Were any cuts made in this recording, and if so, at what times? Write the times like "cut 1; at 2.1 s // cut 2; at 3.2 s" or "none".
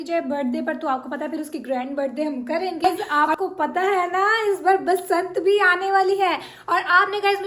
cut 1; at 2.8 s